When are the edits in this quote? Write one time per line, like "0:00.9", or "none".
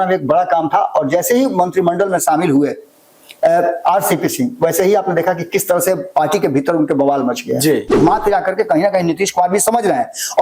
0:07.9

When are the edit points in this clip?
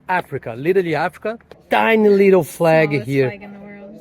0:01.5

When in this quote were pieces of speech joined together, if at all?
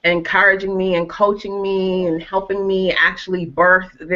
0:02.0

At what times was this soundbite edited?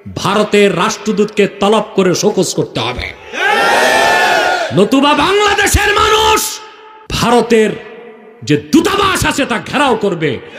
0:07.3

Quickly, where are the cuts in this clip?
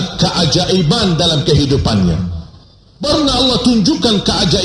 0:03.1

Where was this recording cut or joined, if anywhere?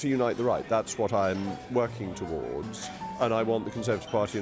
none

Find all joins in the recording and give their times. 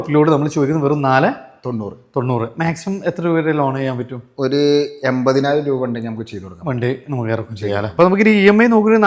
0:07.9

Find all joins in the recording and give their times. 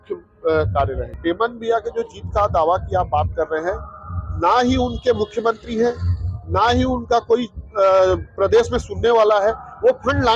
0:01.2

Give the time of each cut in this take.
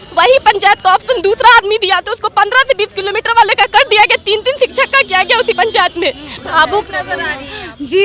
0:06.3

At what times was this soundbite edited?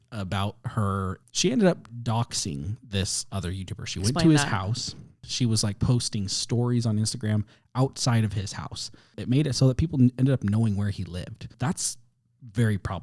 0:01.1
0:05.2
0:09.1
0:11.5

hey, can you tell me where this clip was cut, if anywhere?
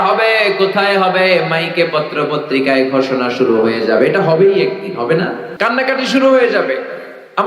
0:05.4

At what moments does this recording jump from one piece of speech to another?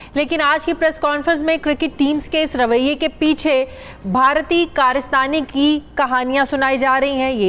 none

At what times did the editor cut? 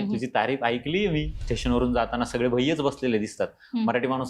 0:01.4

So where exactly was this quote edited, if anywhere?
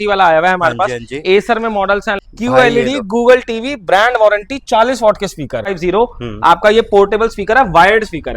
0:02.2
0:05.7

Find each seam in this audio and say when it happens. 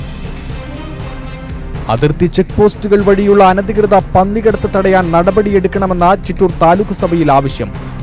0:01.5

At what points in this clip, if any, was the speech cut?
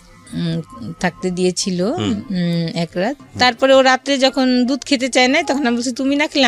0:03.2

